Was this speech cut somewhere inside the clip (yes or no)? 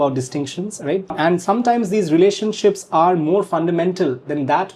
yes